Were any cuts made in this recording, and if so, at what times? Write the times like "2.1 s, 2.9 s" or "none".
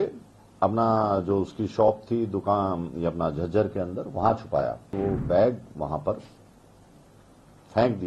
4.9 s